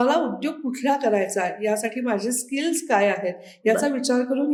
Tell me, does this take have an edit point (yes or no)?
no